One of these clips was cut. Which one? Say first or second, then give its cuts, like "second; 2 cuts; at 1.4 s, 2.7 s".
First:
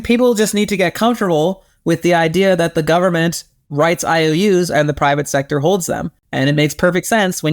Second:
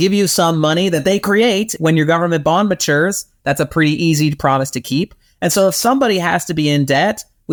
first; 1 cut; at 6.2 s